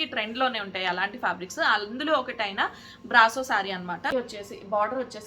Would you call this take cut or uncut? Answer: cut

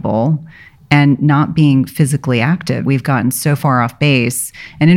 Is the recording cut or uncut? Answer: cut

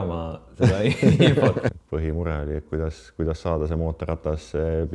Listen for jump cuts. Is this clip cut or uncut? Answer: cut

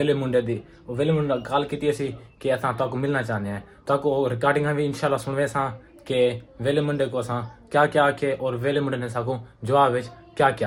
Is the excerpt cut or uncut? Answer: uncut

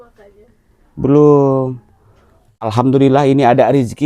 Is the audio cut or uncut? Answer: cut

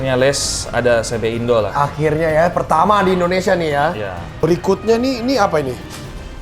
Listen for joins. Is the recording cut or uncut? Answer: cut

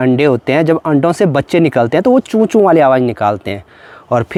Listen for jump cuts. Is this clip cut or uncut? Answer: uncut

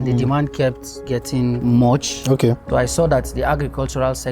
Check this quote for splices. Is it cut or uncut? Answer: cut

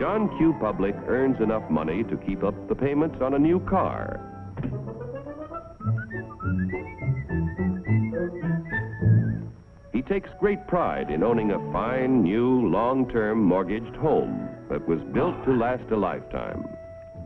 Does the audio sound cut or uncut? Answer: cut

